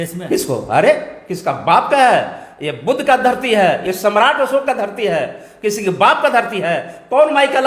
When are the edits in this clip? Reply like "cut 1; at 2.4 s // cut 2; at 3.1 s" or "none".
none